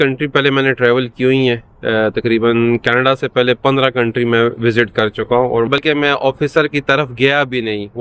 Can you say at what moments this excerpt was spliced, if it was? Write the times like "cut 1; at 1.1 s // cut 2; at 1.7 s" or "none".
cut 1; at 5.7 s